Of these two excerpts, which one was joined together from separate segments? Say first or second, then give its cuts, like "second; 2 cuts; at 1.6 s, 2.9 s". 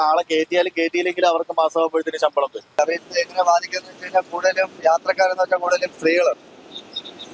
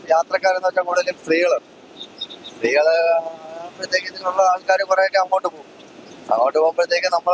first; 1 cut; at 2.6 s